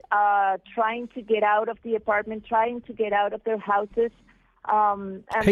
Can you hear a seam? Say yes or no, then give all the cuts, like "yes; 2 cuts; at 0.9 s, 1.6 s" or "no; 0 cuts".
no; 0 cuts